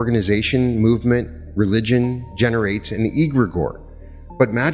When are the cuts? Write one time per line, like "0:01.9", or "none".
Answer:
none